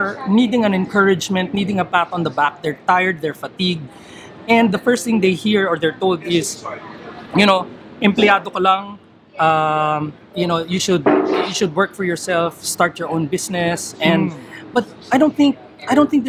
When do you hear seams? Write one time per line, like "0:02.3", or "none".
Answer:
none